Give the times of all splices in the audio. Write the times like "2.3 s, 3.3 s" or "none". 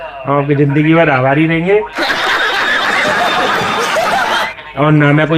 none